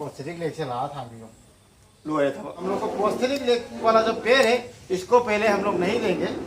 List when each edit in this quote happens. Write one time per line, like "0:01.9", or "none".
0:02.6